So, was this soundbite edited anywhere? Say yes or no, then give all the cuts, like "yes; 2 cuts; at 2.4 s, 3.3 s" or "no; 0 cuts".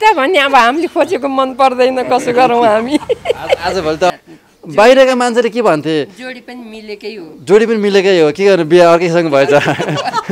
yes; 1 cut; at 4.1 s